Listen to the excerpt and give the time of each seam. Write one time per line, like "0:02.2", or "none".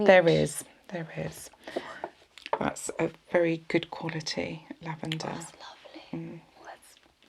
0:02.3